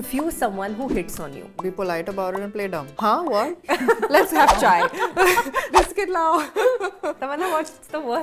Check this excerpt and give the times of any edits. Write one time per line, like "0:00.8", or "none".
0:01.6
0:02.9
0:03.6
0:05.6
0:07.5